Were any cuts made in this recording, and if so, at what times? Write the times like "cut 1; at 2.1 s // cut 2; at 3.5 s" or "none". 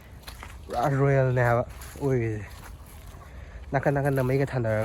none